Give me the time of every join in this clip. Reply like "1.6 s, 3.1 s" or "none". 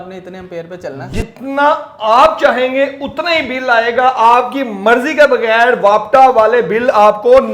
1.1 s

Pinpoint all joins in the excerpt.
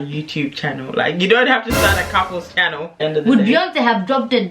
2.9 s

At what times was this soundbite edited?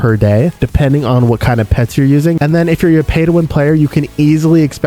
2.4 s

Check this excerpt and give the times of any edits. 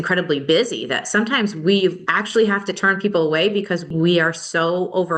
2.1 s, 3.9 s

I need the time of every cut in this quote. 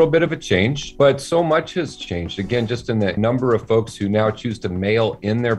0.9 s, 3.2 s

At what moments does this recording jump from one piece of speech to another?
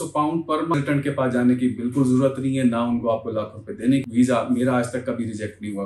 0.7 s, 4.0 s

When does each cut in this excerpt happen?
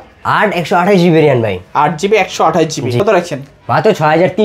3.0 s

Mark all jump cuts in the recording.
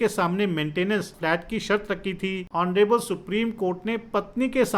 1.1 s, 2.4 s

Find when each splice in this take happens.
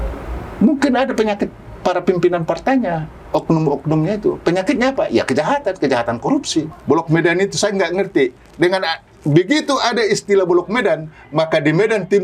6.7 s

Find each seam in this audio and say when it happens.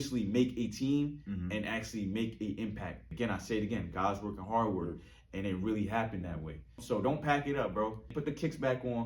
3.0 s, 6.8 s, 8.1 s

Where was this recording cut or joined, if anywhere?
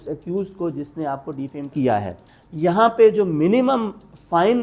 2.2 s

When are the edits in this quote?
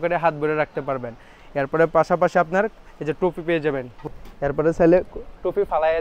4.0 s

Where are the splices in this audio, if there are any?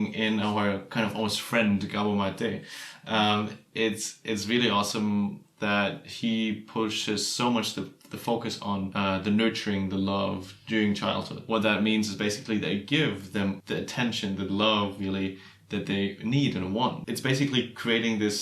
8.9 s, 11.4 s, 13.6 s, 17.1 s

